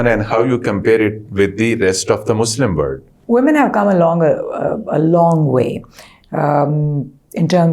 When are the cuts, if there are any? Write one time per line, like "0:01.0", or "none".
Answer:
0:03.1